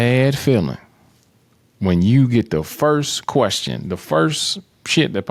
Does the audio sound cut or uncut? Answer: uncut